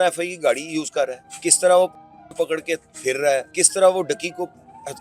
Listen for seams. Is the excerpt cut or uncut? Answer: cut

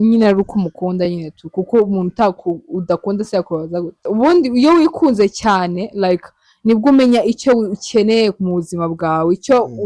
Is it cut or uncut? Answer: cut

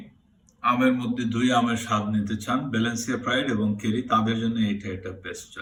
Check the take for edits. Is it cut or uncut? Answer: uncut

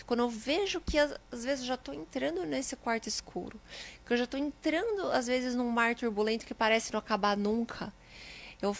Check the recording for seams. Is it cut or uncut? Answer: uncut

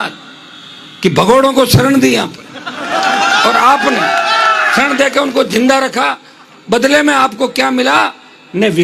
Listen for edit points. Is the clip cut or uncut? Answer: uncut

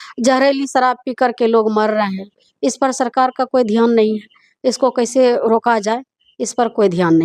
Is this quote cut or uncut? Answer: uncut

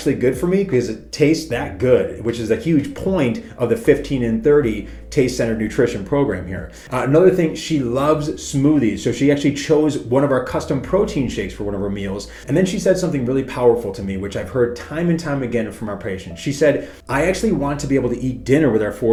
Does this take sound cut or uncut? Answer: uncut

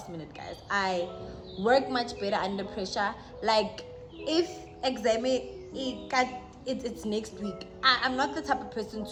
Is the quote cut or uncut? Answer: uncut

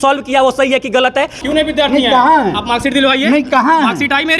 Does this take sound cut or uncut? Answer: cut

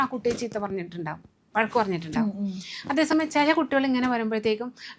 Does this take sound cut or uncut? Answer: uncut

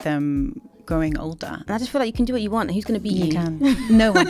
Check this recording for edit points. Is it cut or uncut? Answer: cut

